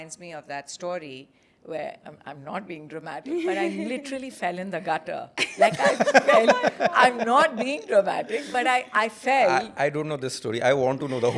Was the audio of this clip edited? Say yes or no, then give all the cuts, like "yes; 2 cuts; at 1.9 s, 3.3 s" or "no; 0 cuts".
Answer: no; 0 cuts